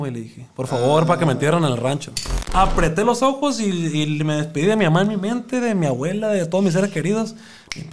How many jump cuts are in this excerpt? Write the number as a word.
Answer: one